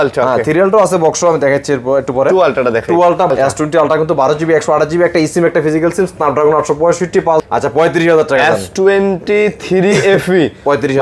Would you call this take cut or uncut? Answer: cut